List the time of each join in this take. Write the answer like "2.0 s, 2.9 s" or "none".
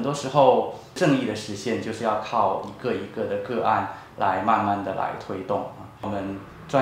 0.9 s, 5.9 s